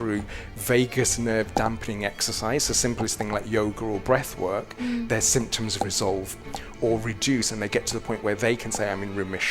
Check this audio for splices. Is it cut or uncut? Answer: uncut